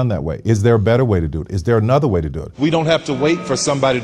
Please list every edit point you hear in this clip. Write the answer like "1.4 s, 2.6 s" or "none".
2.4 s